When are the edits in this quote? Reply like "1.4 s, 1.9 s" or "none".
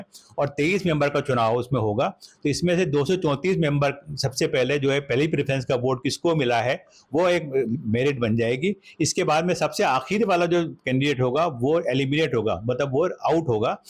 none